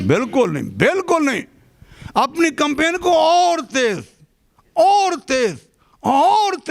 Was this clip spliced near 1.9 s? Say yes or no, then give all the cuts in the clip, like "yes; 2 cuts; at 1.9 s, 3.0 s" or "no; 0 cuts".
no; 0 cuts